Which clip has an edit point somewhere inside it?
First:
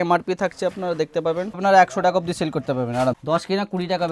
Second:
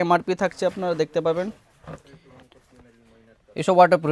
first; 2 cuts; at 1.6 s, 3.2 s

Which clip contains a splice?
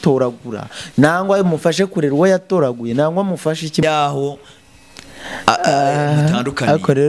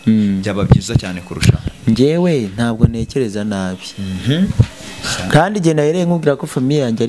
first; 1 cut; at 3.8 s

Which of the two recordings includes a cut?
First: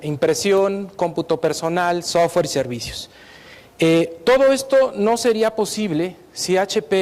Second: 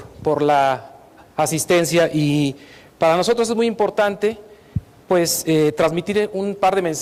first; 1 cut; at 1.2 s

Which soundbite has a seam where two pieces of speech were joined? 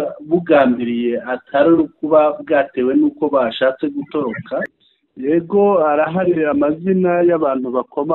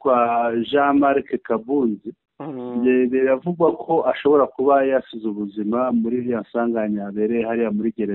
first; 1 cut; at 4.8 s

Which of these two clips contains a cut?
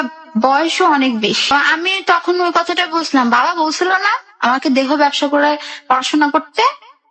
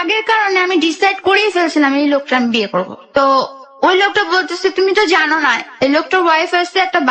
first; 1 cut; at 1.5 s

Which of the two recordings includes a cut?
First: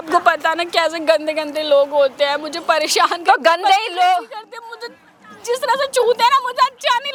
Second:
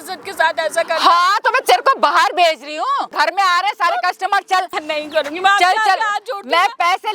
second; 2 cuts; at 3.1 s, 4.8 s

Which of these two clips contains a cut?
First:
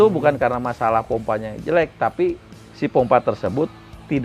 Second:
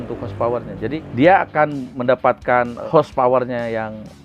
second; 3 cuts; at 1.1 s, 1.9 s, 2.8 s

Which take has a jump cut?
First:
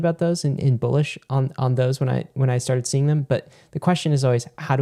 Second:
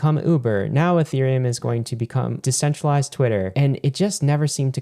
second; 2 cuts; at 2.4 s, 3.5 s

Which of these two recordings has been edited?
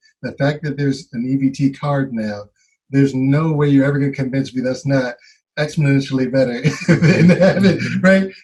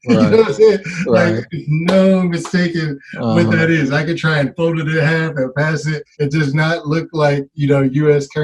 second; 1 cut; at 6.0 s

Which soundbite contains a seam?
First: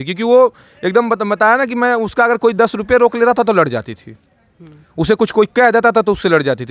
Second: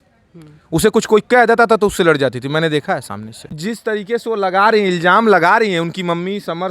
second; 1 cut; at 3.5 s

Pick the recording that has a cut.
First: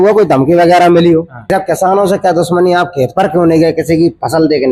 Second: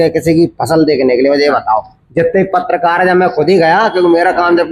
first; 1 cut; at 1.5 s

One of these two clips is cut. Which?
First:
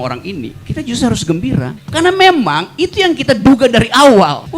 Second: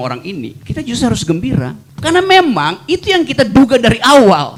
first; 1 cut; at 1.8 s

